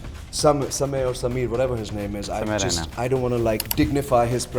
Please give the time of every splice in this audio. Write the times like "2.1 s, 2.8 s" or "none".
3.7 s